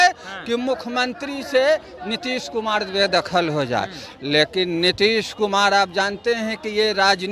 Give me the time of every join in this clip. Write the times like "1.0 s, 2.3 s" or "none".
none